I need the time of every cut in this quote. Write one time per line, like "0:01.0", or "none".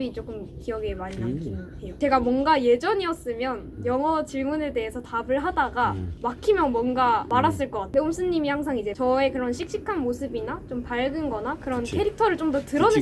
0:01.8
0:06.1
0:07.4
0:08.9